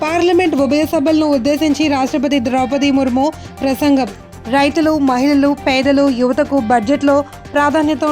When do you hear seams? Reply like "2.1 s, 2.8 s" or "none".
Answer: none